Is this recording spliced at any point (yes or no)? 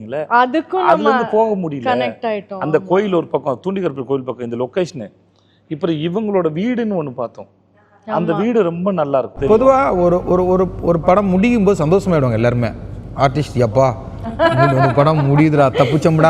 yes